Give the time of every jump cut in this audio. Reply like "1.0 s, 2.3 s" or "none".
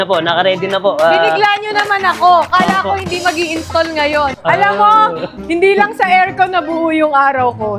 4.3 s